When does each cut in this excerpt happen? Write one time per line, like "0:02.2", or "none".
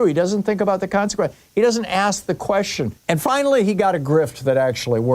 0:03.0